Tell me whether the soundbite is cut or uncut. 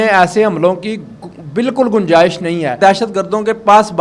cut